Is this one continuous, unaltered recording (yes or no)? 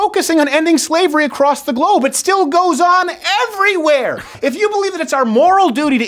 no